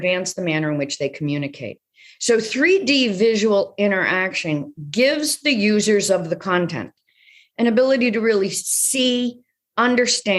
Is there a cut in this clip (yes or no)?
yes